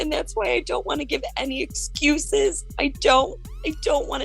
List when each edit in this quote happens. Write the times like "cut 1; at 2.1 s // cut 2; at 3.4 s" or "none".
none